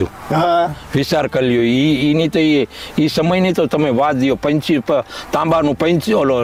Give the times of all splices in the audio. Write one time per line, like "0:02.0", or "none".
none